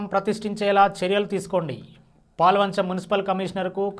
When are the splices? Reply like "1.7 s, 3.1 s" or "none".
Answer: none